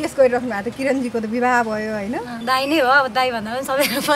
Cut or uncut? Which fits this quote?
cut